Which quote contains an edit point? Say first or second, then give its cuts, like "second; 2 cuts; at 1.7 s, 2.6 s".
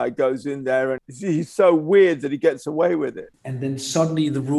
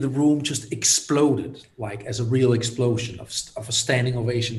first; 2 cuts; at 1.1 s, 3.3 s